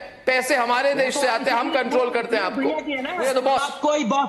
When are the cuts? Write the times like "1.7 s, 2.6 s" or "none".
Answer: 3.2 s